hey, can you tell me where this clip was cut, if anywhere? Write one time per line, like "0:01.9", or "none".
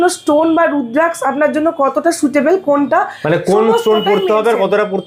none